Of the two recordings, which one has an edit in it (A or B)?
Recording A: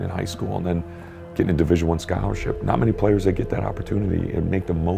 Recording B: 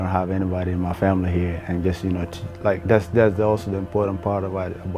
A